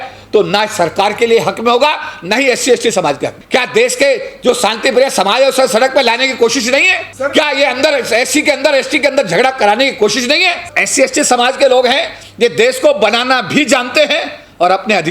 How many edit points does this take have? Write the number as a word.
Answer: three